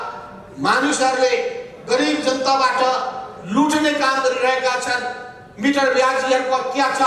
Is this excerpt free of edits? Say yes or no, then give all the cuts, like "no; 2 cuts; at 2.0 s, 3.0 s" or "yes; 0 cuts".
yes; 0 cuts